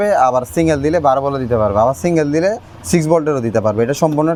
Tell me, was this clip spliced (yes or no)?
no